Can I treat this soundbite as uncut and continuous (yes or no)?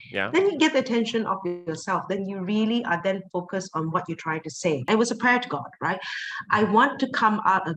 no